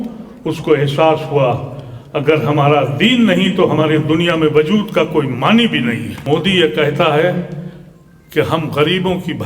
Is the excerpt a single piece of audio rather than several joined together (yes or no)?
no